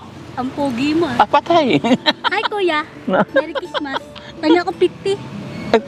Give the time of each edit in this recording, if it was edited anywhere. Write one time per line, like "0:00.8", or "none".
none